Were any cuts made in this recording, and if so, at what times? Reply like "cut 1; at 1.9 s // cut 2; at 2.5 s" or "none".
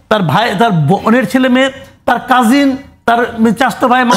none